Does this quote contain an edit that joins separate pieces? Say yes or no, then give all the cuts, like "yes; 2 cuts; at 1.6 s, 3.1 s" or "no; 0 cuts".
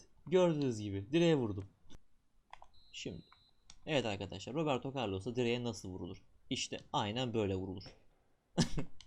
no; 0 cuts